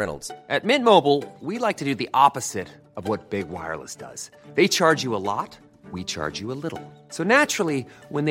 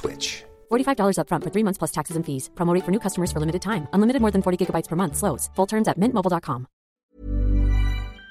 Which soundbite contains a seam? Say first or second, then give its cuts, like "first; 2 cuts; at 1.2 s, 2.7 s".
second; 1 cut; at 7.0 s